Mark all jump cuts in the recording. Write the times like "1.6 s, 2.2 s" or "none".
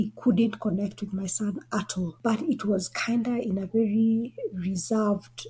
none